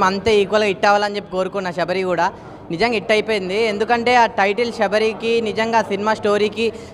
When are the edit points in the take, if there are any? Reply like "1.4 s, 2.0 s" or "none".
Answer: none